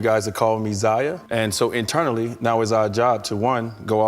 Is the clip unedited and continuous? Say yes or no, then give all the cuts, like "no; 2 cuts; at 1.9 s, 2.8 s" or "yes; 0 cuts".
no; 1 cut; at 1.3 s